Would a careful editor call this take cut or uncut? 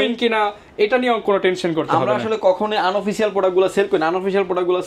uncut